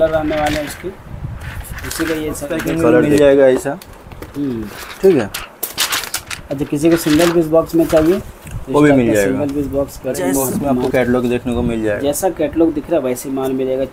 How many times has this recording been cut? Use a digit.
2